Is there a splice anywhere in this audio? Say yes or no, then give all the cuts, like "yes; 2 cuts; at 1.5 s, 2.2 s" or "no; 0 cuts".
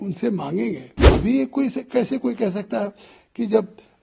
yes; 1 cut; at 1.1 s